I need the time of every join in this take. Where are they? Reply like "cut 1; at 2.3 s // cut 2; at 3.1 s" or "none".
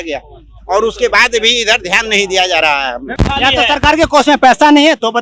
cut 1; at 3.1 s